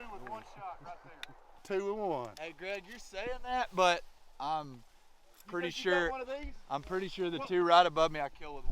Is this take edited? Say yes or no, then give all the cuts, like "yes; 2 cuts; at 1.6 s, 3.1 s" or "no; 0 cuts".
yes; 1 cut; at 1.6 s